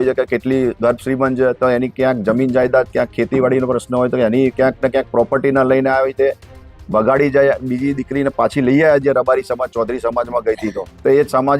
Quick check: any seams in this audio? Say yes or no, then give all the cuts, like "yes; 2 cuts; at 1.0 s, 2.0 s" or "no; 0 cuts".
yes; 1 cut; at 7.7 s